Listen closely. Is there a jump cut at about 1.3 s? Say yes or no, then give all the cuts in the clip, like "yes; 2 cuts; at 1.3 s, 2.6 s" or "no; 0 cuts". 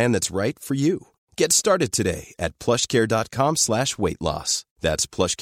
no; 0 cuts